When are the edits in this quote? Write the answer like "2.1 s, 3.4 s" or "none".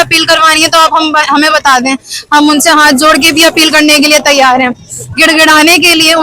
3.9 s